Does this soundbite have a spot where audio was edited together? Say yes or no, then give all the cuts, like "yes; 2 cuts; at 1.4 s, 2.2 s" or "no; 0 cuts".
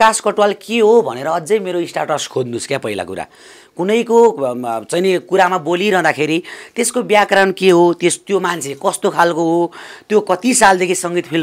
no; 0 cuts